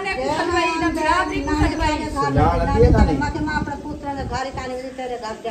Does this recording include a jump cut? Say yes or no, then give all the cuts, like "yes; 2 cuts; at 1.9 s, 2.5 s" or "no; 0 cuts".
no; 0 cuts